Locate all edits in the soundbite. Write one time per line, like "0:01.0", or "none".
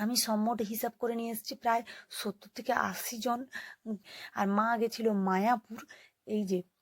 0:04.0